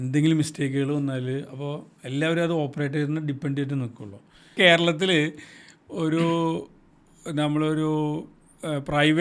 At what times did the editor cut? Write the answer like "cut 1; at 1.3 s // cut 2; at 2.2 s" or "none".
cut 1; at 4.5 s